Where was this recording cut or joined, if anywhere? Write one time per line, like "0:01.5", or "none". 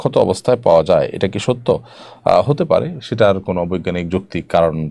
none

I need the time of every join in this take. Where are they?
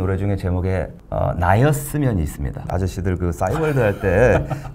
0:01.0
0:02.7

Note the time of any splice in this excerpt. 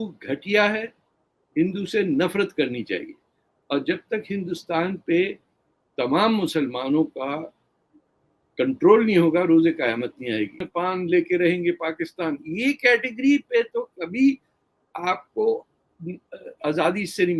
0:10.6

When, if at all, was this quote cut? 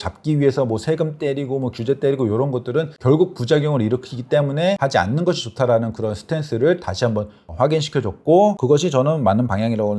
0:02.9
0:04.8
0:08.6

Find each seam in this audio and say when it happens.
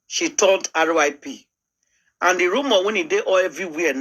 none

